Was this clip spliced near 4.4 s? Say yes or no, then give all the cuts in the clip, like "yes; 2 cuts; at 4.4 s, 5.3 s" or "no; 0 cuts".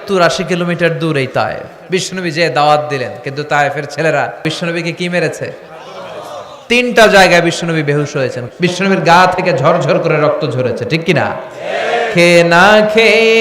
yes; 3 cuts; at 1.7 s, 4.4 s, 8.4 s